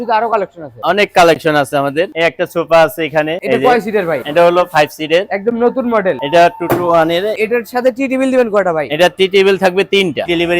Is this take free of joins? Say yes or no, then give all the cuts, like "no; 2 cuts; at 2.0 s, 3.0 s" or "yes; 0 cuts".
yes; 0 cuts